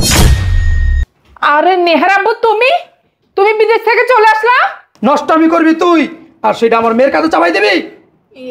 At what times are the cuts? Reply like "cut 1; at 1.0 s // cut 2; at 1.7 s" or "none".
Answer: cut 1; at 4.9 s